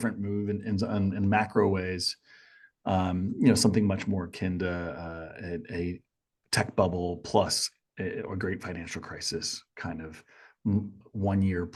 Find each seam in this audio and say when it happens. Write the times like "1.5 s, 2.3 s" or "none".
none